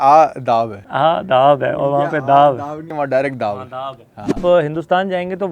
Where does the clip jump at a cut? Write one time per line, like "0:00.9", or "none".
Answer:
0:04.4